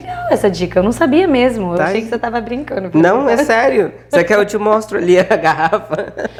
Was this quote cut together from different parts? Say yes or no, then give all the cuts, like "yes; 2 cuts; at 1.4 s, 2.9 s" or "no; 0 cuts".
no; 0 cuts